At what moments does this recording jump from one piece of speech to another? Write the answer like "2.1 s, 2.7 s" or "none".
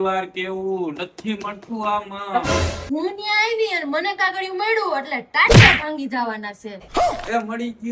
none